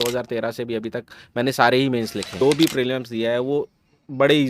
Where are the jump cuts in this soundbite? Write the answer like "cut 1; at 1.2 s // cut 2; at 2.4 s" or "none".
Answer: cut 1; at 2.4 s